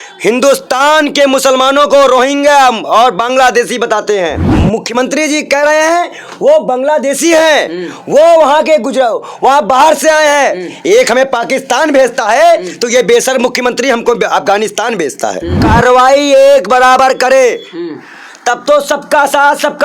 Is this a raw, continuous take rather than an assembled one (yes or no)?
no